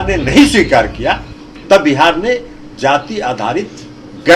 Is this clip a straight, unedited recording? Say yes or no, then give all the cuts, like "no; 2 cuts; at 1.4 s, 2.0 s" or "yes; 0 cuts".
yes; 0 cuts